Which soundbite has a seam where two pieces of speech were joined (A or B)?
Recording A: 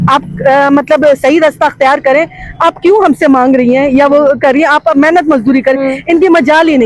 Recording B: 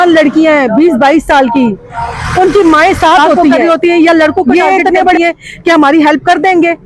B